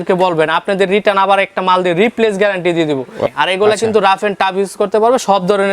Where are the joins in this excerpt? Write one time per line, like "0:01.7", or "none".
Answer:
0:03.2